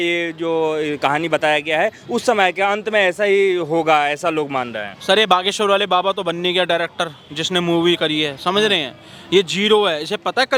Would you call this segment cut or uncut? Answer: uncut